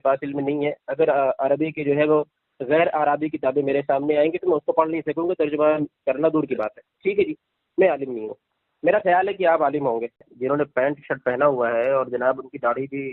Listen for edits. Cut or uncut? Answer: cut